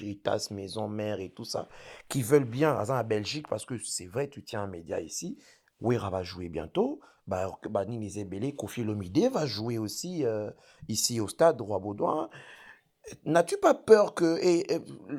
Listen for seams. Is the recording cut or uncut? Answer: uncut